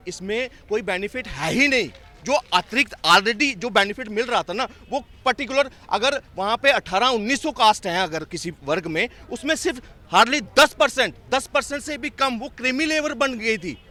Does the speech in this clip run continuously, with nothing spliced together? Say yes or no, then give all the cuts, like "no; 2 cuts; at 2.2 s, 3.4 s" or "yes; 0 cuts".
yes; 0 cuts